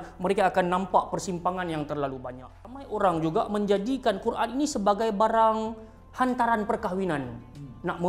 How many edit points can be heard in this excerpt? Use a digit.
1